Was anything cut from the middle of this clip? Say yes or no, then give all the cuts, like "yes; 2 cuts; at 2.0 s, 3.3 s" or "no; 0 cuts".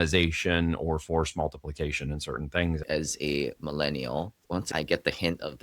yes; 2 cuts; at 2.9 s, 4.6 s